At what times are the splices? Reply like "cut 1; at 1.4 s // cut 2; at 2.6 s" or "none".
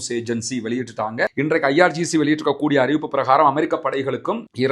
cut 1; at 1.3 s